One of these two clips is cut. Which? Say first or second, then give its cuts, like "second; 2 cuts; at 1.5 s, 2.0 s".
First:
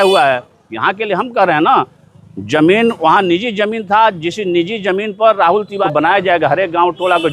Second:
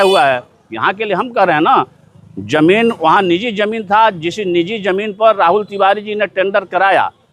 first; 1 cut; at 5.8 s